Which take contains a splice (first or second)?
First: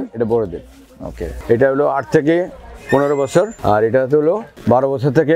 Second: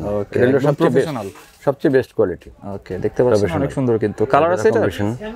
first